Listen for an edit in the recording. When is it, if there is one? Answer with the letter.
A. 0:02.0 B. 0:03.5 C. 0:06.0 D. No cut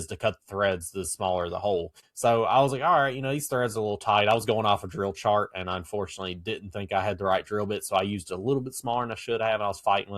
A